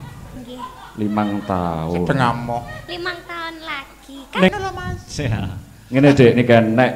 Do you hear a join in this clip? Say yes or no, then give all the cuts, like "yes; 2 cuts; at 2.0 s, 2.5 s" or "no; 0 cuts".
yes; 1 cut; at 4.5 s